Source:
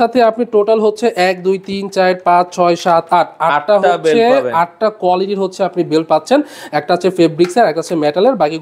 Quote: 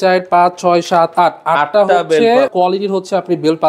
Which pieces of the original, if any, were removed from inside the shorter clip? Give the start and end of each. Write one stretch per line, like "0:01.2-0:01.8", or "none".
0:04.4-0:05.0

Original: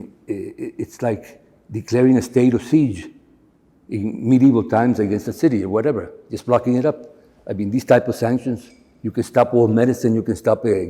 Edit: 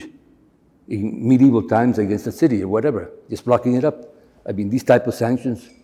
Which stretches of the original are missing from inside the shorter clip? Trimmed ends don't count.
none

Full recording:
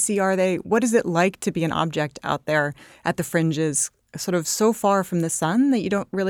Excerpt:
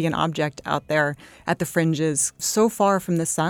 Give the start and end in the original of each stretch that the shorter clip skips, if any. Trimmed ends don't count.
0:04.0-0:04.5

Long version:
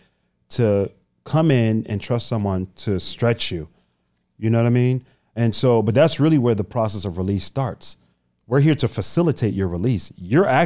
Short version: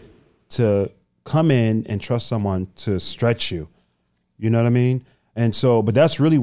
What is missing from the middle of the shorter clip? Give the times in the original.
none

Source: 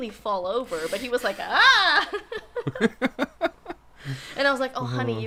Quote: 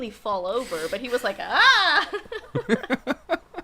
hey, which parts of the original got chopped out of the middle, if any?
0:02.6-0:02.7

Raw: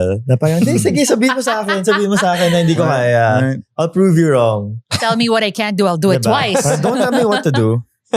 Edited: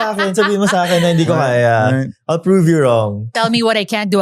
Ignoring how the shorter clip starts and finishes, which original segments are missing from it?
0:04.7-0:04.9

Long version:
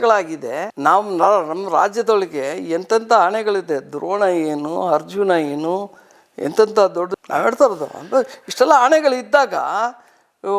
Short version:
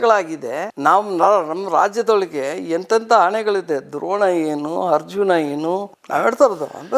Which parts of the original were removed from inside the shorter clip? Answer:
0:06.0-0:07.2

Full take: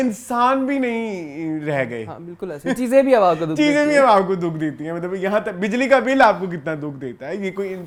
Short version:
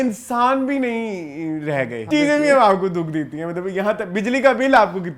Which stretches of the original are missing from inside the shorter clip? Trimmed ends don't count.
0:02.0-0:03.5

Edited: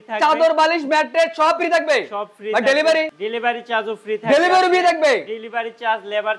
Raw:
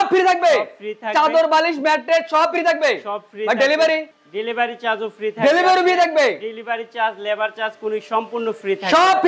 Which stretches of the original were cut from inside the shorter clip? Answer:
0:04.1-0:04.3

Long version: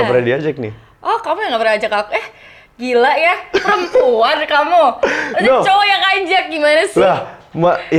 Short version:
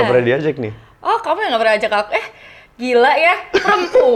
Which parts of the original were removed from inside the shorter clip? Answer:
none

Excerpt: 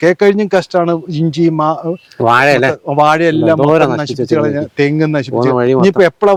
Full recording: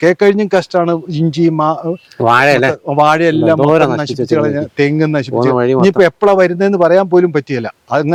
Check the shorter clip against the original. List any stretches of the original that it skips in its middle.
none

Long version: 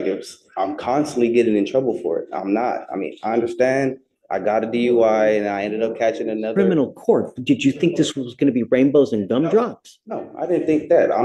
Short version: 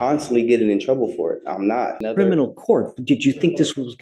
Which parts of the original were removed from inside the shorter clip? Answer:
0:02.9-0:06.4

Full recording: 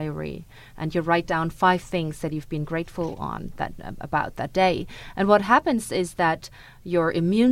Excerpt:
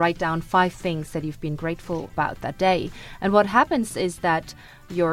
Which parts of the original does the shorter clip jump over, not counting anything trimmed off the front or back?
0:03.2-0:04.0

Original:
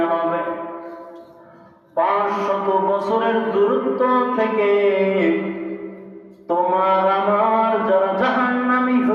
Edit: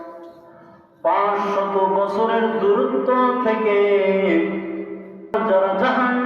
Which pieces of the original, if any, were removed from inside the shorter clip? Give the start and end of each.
0:06.3-0:07.7

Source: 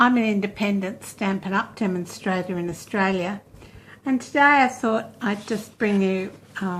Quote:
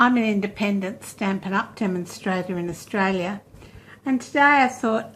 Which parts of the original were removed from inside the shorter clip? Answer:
none

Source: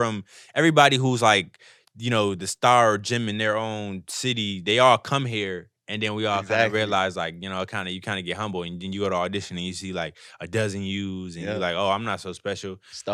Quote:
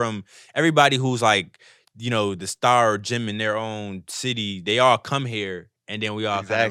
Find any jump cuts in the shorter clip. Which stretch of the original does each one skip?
none

